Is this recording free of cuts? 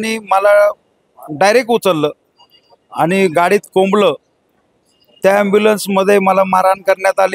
yes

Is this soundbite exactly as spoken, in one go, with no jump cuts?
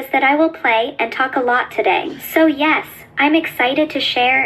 no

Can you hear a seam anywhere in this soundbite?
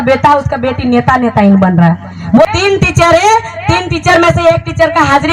yes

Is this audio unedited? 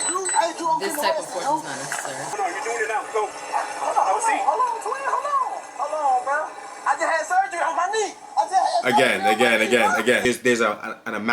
no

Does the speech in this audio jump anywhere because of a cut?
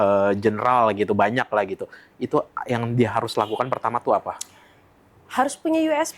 no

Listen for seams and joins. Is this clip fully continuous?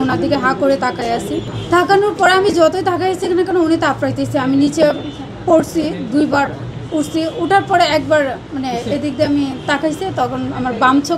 yes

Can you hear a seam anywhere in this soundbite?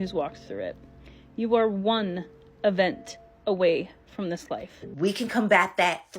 yes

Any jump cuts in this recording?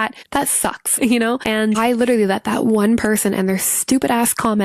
yes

